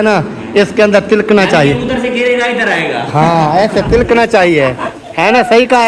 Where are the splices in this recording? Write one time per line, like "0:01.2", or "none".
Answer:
none